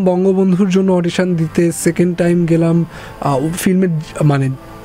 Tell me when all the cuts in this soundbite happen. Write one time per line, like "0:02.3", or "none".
none